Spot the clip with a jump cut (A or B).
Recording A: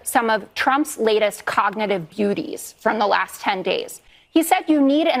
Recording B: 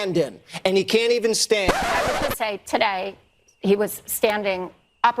B